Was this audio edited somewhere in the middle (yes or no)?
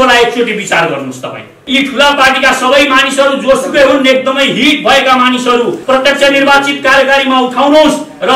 yes